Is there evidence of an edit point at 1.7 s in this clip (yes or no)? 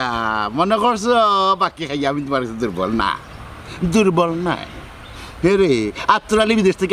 no